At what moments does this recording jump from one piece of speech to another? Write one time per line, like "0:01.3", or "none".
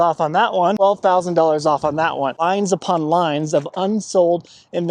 0:00.8
0:02.4